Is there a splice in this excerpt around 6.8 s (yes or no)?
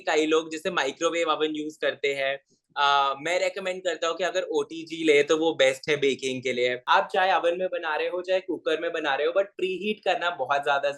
yes